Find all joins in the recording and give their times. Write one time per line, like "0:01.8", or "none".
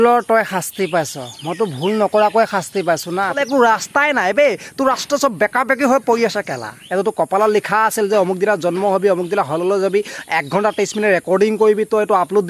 0:03.4
0:06.8